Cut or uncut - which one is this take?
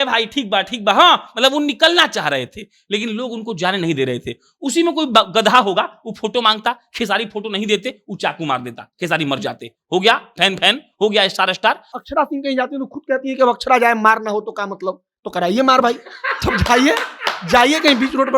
cut